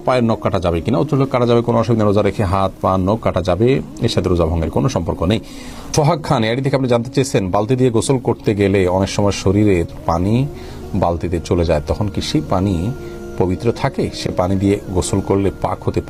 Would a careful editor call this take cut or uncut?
uncut